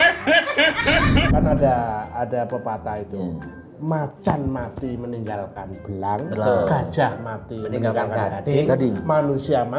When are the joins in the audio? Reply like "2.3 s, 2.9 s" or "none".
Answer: 1.4 s